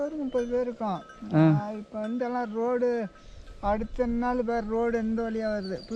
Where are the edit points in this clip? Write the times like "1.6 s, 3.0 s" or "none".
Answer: none